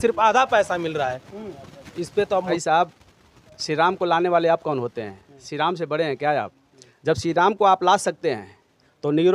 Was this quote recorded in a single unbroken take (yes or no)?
no